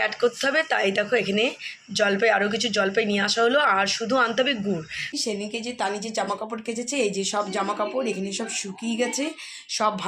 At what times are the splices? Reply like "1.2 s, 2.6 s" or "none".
5.1 s